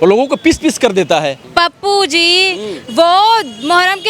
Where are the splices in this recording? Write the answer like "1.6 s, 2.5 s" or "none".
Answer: 1.4 s